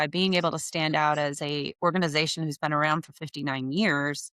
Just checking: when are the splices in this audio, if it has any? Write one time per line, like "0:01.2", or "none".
none

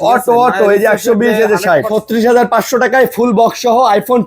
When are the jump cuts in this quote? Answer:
0:01.9

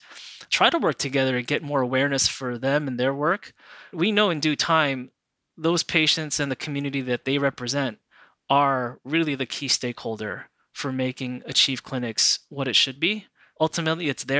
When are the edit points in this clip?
0:03.9
0:13.5

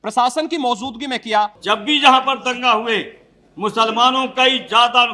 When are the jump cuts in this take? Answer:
0:01.6

